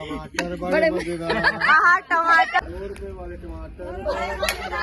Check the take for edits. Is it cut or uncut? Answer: uncut